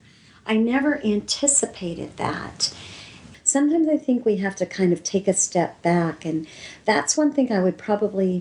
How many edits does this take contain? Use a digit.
1